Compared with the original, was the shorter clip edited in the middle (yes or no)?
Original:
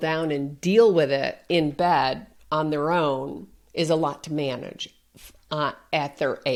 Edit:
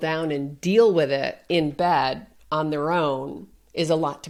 no